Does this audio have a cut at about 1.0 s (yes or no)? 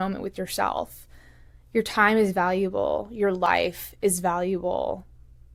no